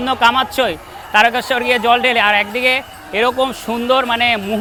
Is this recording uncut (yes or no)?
yes